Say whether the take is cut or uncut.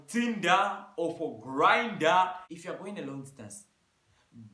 cut